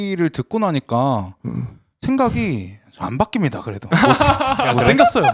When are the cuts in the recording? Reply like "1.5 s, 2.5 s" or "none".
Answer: none